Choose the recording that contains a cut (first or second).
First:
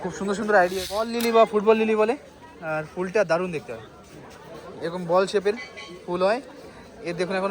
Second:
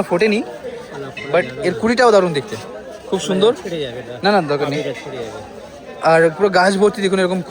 first